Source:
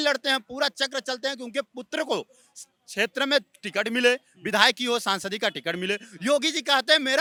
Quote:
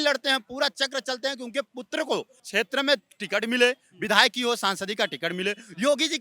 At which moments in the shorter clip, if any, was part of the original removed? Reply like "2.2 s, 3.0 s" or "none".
2.4 s